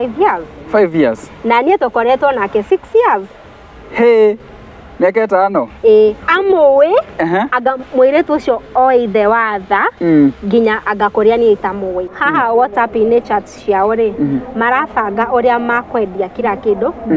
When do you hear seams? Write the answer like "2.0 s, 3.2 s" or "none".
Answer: 12.2 s